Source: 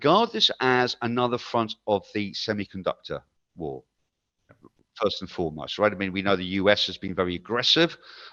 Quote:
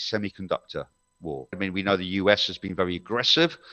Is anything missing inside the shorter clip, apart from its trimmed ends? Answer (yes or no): yes